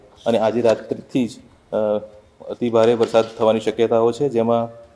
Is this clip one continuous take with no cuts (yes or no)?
yes